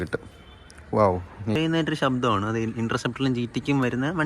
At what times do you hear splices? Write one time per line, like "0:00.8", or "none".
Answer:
0:01.6